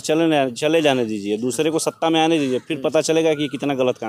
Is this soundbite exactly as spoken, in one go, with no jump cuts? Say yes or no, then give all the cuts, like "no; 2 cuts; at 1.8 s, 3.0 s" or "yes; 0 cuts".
yes; 0 cuts